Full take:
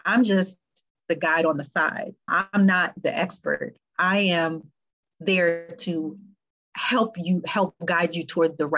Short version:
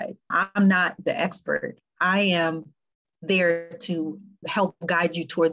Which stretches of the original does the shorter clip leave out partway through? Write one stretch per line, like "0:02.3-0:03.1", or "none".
0:06.5-0:07.5